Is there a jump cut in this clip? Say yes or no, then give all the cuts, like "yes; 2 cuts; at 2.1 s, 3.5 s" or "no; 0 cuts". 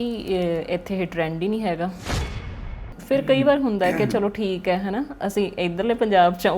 yes; 1 cut; at 2.4 s